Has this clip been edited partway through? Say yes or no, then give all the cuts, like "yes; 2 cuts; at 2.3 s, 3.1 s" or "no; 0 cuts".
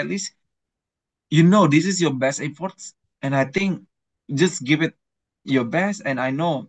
no; 0 cuts